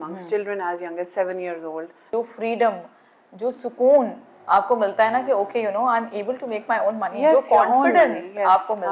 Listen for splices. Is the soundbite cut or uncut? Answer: cut